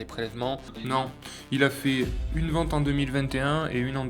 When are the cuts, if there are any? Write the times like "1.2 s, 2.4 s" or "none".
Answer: 1.2 s